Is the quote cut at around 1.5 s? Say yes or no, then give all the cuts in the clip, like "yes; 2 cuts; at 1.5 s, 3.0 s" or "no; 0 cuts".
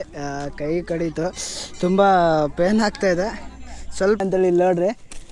no; 1 cut; at 4.2 s